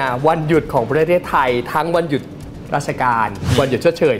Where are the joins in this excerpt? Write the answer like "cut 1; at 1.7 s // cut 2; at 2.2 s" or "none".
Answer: none

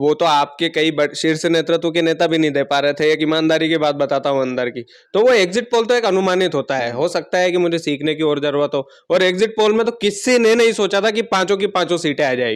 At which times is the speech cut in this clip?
none

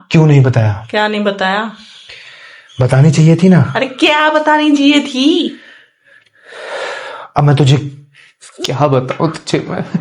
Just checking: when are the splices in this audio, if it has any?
none

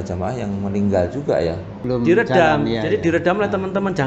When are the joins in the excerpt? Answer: cut 1; at 1.8 s

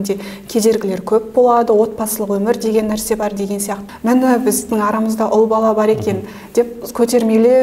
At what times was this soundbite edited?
cut 1; at 3.8 s

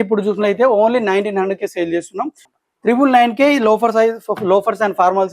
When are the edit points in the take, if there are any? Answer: cut 1; at 2.4 s

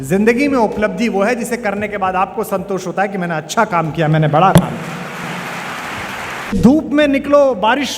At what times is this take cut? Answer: cut 1; at 6.5 s

